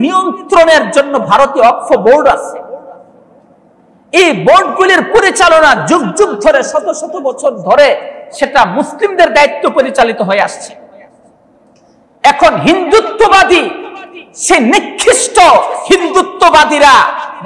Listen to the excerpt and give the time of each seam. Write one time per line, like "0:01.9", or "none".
none